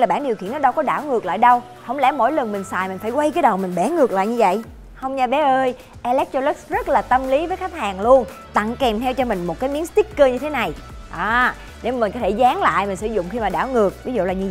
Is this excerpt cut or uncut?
uncut